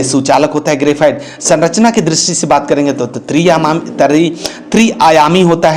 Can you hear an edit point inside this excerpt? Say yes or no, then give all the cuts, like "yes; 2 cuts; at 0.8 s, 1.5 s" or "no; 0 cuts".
no; 0 cuts